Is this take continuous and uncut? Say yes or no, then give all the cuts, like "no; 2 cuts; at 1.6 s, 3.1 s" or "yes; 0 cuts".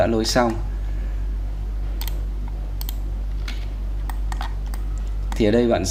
yes; 0 cuts